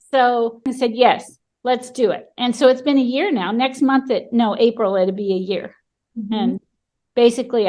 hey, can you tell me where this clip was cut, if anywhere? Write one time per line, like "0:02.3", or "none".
none